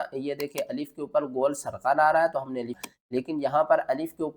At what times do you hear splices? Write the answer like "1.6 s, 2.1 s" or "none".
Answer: 2.8 s